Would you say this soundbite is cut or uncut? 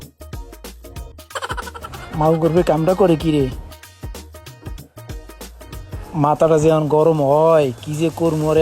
cut